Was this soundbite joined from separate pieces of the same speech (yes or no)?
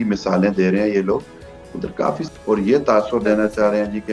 yes